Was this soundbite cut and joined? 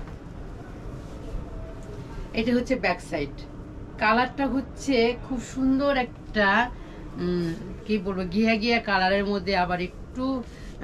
no; 0 cuts

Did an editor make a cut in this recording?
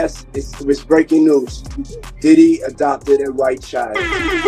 no; 0 cuts

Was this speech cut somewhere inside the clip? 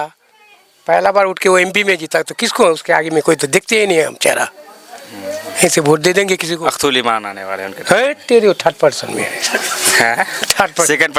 no; 0 cuts

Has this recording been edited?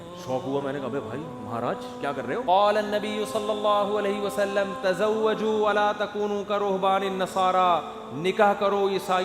yes; 1 cut; at 2.4 s

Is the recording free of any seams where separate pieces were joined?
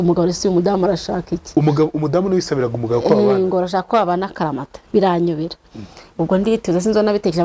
yes; 0 cuts

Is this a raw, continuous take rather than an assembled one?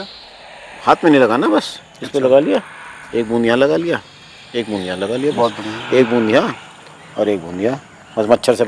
yes; 0 cuts

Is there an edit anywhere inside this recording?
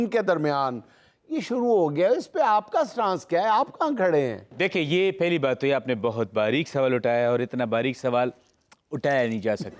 no; 0 cuts

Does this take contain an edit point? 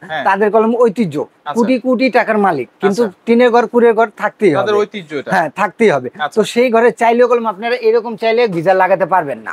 no; 0 cuts

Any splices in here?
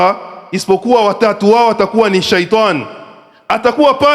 no; 0 cuts

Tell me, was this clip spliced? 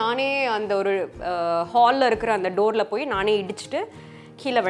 no; 0 cuts

